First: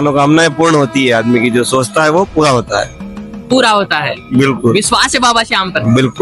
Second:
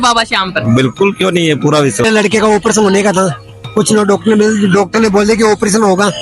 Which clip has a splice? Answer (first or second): second